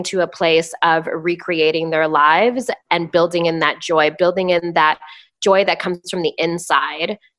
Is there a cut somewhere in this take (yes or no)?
no